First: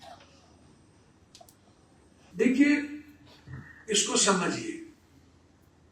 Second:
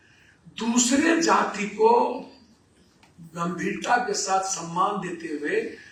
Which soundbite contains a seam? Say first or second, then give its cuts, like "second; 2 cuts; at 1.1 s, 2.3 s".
first; 1 cut; at 2.2 s